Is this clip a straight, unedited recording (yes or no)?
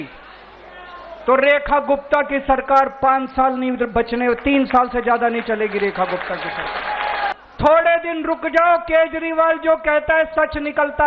no